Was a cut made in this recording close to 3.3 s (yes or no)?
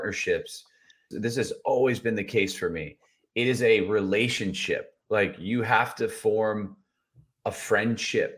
no